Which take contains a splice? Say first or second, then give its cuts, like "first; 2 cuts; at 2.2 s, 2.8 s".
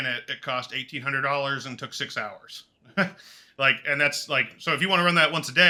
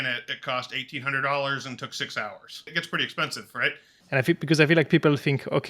second; 2 cuts; at 2.7 s, 3.9 s